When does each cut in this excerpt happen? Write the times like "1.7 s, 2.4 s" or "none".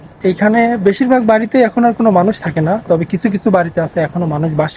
none

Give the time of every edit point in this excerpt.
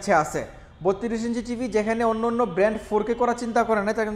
none

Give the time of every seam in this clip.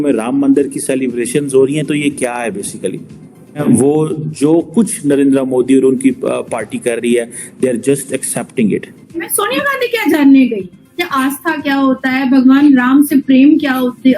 3.6 s, 9.4 s

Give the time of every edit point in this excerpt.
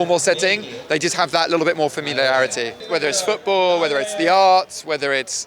2.8 s

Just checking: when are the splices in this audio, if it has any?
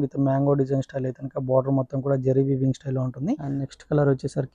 3.5 s

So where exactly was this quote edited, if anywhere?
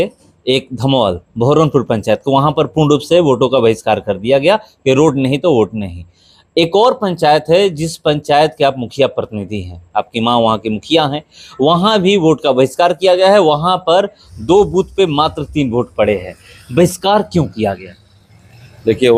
none

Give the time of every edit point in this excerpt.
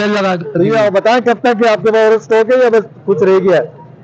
none

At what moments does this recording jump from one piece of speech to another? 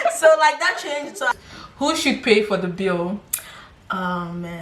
1.3 s

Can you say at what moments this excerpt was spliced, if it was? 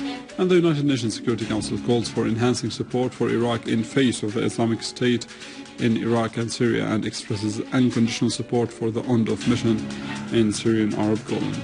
3.6 s

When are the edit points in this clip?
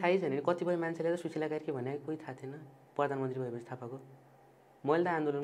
none

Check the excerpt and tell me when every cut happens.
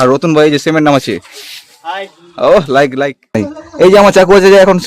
3.4 s

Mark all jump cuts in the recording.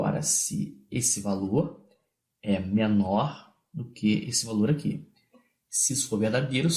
2.5 s

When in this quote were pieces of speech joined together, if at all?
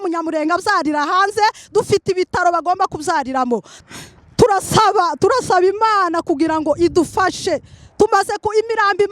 3.7 s

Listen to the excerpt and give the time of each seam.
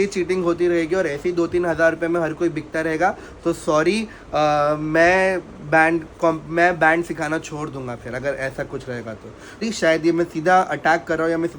9.6 s

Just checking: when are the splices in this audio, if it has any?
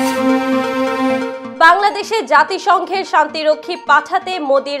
none

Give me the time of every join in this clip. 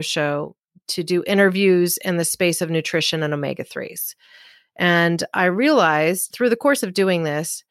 6.3 s

